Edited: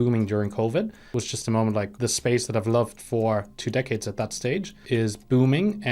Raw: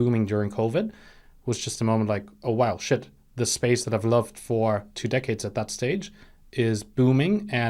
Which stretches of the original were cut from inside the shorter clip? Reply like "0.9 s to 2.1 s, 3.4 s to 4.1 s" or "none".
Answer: 1.0 s to 1.3 s, 2.3 s to 3.3 s, 6.1 s to 6.4 s